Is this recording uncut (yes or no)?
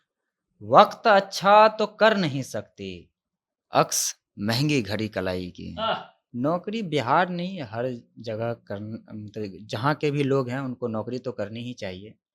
no